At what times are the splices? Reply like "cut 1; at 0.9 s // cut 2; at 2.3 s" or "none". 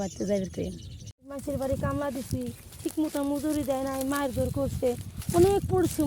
cut 1; at 1.3 s